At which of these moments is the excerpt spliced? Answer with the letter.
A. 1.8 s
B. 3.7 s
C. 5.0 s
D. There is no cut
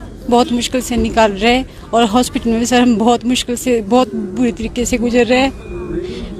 D